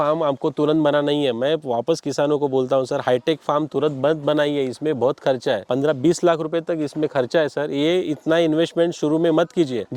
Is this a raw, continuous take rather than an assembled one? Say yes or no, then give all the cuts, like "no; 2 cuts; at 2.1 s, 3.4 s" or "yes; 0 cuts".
yes; 0 cuts